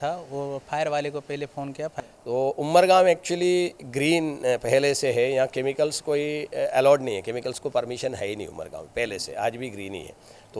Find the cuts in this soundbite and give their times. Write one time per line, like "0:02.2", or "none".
0:01.9